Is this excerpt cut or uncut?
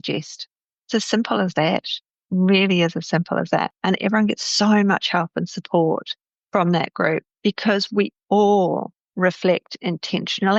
uncut